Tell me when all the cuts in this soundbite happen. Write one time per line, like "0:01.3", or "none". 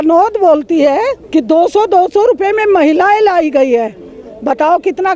0:01.2